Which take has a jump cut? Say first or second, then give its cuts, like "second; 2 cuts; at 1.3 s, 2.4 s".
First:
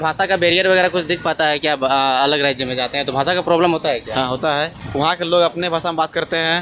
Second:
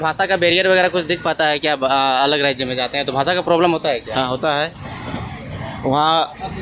first; 1 cut; at 4.8 s